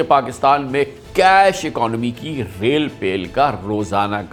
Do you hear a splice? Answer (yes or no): no